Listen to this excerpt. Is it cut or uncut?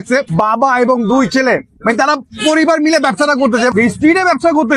cut